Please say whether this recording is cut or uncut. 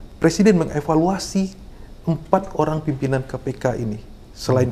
uncut